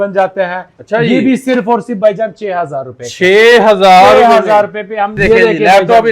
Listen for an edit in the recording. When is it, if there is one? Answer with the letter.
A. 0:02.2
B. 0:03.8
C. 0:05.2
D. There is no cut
C